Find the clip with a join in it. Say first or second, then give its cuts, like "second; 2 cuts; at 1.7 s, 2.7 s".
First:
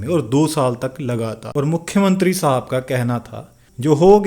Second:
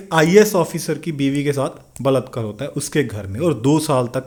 first; 1 cut; at 1.9 s